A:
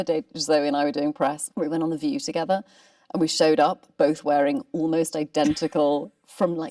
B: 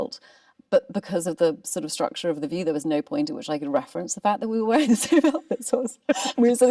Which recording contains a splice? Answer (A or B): A